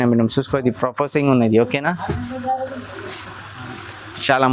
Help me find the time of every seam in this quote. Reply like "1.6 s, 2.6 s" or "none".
none